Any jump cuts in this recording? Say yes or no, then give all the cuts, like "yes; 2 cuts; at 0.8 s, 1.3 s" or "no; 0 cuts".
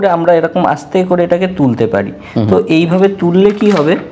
no; 0 cuts